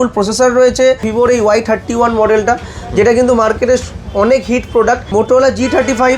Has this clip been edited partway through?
yes; 2 cuts; at 1.1 s, 5.0 s

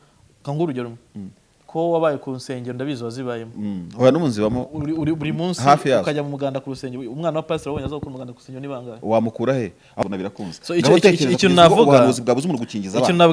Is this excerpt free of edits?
no; 1 cut; at 10.0 s

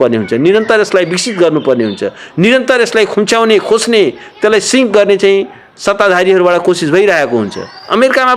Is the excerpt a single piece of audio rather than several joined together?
yes; 0 cuts

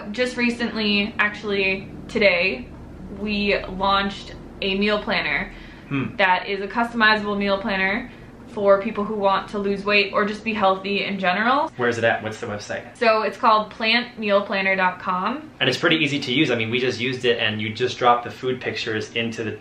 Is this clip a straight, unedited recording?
no; 2 cuts; at 11.7 s, 15.5 s

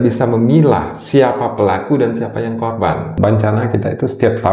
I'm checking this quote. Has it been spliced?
yes; 1 cut; at 3.2 s

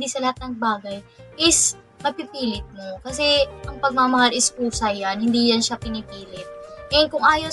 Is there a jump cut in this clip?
no; 0 cuts

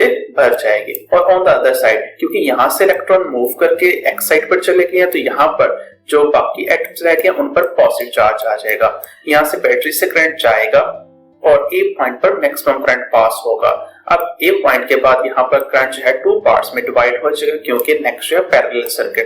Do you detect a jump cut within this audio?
yes; 2 cuts; at 0.9 s, 9.1 s

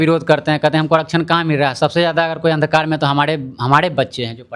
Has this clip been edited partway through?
no; 0 cuts

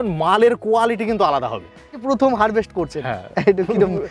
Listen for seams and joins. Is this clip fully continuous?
no; 1 cut; at 2.0 s

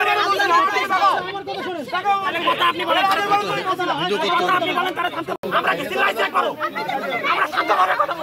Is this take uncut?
no; 1 cut; at 5.4 s

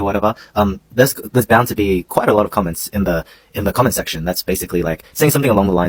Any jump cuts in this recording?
no; 0 cuts

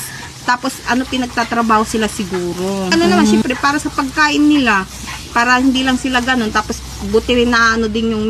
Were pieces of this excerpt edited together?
yes; 1 cut; at 3.4 s

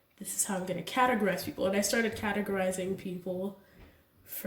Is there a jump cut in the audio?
no; 0 cuts

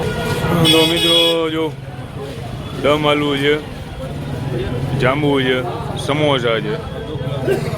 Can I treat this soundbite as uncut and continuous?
yes; 0 cuts

